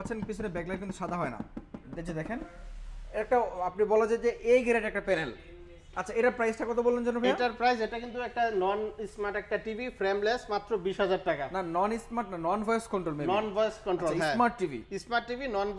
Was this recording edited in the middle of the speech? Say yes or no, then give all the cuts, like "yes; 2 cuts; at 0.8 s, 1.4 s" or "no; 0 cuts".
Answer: no; 0 cuts